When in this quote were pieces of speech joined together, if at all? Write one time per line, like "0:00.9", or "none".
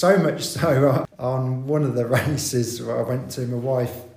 0:01.1